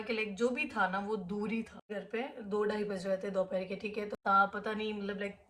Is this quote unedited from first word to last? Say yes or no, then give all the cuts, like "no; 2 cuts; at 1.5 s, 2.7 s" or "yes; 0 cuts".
no; 2 cuts; at 1.8 s, 4.2 s